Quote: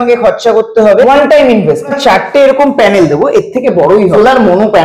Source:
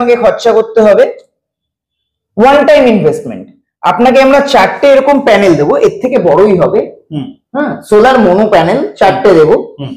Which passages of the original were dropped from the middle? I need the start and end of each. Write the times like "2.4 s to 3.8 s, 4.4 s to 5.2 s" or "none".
1.0 s to 2.4 s, 3.3 s to 4.4 s, 6.6 s to 7.9 s